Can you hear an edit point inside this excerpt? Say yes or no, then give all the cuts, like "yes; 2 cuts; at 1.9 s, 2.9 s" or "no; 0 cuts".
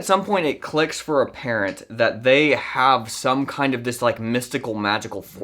no; 0 cuts